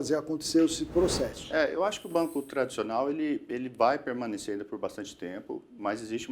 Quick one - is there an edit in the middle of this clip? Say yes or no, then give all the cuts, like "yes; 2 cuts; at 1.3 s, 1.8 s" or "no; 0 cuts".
yes; 1 cut; at 1.4 s